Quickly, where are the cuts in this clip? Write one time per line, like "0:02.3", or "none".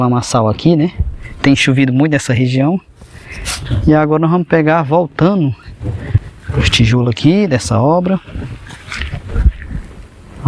none